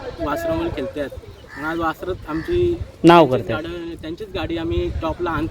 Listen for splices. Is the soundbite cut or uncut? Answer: uncut